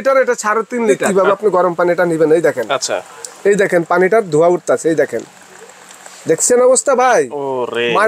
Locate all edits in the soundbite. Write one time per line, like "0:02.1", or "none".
0:01.0